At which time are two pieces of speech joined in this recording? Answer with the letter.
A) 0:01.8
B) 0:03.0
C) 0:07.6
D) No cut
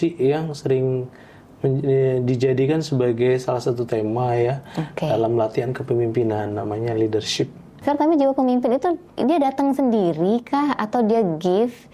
C